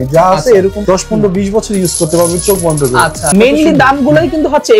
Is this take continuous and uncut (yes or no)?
no